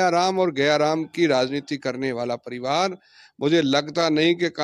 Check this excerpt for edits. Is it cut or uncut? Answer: uncut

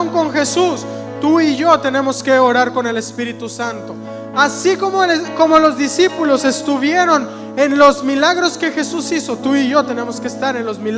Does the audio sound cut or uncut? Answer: uncut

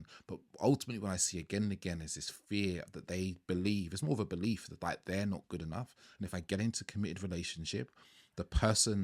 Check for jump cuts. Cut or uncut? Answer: uncut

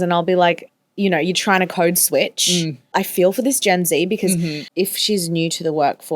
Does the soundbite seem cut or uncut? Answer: cut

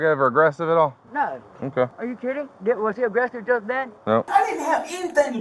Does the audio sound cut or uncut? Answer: cut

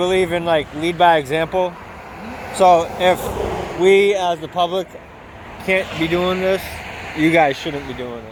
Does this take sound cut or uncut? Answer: uncut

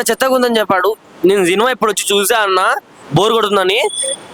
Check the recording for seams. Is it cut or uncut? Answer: uncut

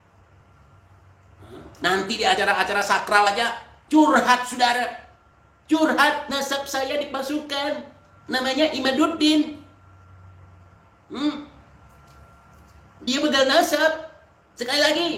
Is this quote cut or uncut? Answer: uncut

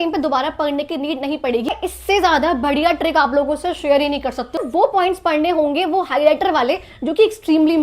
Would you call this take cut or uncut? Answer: cut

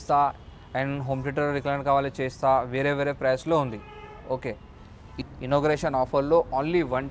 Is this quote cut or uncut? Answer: cut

